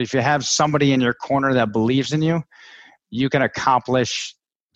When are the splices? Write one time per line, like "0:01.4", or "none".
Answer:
none

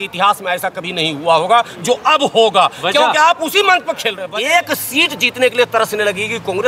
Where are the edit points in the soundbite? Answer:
0:04.2

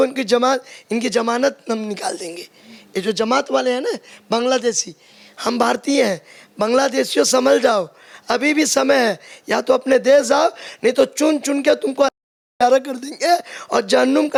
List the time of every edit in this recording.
none

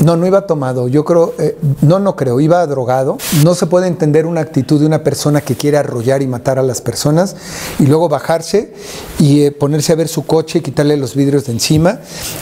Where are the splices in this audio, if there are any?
0:03.2

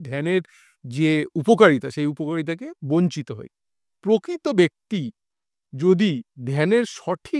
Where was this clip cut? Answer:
none

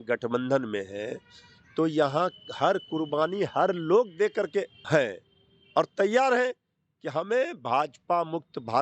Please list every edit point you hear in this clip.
0:04.8

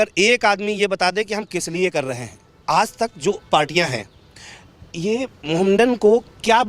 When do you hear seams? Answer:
0:02.5

